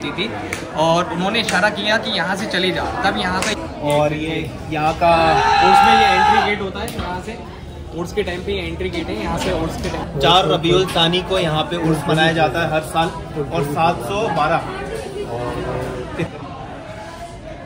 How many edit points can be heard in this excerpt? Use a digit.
3